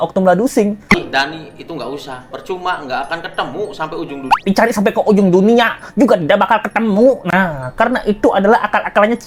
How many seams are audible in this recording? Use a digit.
2